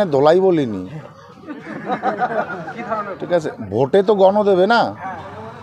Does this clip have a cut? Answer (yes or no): no